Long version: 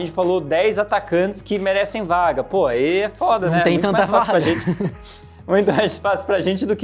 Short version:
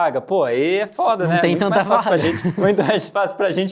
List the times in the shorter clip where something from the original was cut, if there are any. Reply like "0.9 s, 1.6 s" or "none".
2.6 s